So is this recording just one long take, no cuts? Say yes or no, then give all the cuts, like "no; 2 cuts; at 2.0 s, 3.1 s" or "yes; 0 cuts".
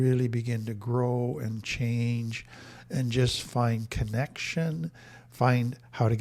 yes; 0 cuts